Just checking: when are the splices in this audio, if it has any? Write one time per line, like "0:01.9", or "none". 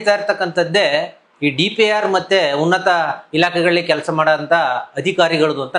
none